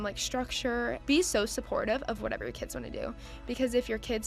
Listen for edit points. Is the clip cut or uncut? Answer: cut